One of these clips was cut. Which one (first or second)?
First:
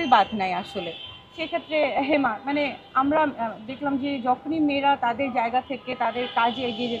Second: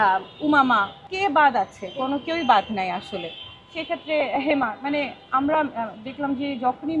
second